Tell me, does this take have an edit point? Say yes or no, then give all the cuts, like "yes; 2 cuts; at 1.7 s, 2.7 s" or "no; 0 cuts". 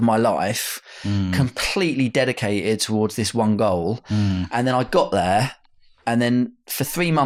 no; 0 cuts